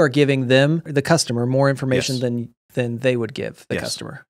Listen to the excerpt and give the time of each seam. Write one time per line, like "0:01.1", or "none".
0:00.9